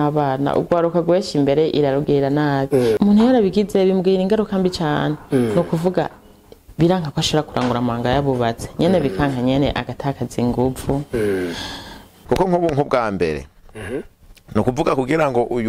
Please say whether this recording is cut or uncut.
cut